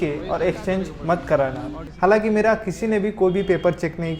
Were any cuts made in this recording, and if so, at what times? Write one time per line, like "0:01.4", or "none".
0:01.8